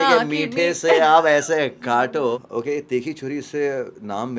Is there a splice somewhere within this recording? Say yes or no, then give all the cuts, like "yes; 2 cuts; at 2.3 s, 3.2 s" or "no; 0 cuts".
yes; 1 cut; at 2.3 s